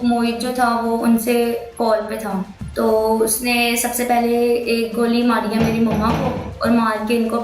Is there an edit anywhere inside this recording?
yes; 1 cut; at 2.6 s

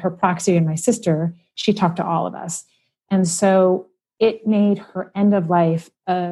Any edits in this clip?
no; 0 cuts

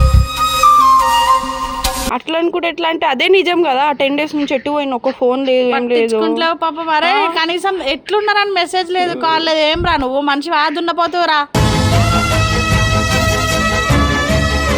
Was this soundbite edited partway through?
yes; 1 cut; at 2.1 s

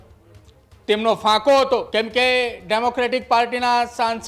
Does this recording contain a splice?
yes; 1 cut; at 1.9 s

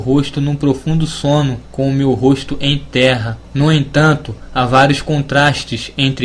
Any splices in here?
yes; 1 cut; at 3.9 s

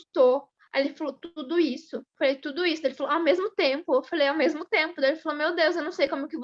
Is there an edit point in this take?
no; 0 cuts

